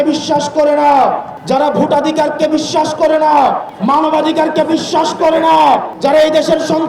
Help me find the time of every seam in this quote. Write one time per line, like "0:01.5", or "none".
0:01.3
0:03.7
0:05.9